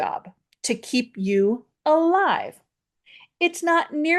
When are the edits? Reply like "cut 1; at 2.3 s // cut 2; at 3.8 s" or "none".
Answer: none